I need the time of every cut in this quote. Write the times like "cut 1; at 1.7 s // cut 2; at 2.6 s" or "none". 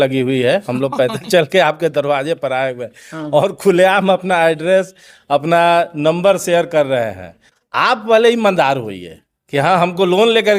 none